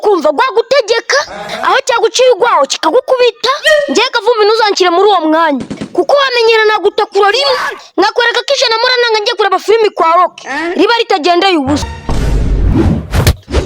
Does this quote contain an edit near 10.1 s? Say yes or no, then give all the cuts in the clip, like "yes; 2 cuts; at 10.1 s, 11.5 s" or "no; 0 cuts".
no; 1 cut; at 11.9 s